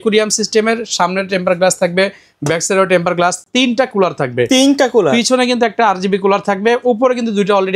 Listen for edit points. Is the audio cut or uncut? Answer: uncut